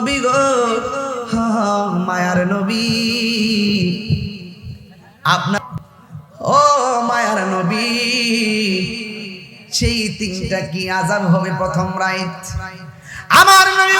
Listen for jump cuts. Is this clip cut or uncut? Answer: cut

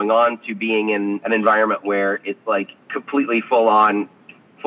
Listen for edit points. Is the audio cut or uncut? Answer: cut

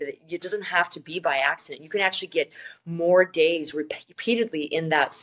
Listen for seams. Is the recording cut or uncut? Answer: uncut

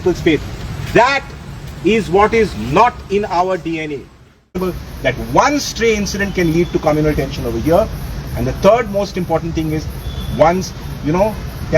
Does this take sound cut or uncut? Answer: cut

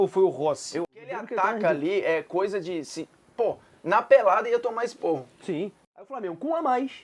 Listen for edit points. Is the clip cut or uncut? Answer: cut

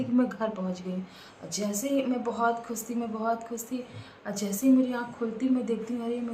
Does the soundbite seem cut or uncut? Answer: uncut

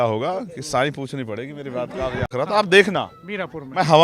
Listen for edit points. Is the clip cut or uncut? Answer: cut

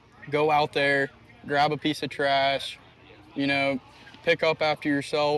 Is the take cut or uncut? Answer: uncut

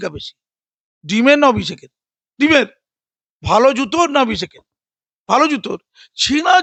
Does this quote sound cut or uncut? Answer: uncut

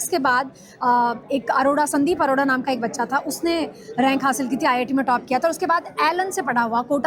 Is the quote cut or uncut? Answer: uncut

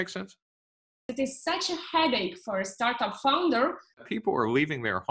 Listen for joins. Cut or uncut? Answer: cut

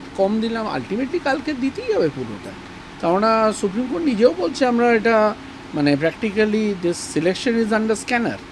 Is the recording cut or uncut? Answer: uncut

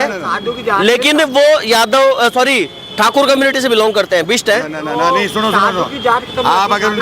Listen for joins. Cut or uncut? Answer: uncut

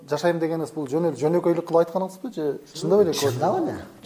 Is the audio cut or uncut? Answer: uncut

